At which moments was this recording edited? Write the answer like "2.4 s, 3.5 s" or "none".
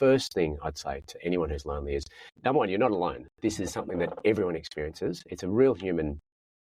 2.2 s